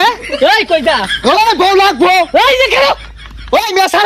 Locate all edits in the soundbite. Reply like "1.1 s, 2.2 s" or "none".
3.0 s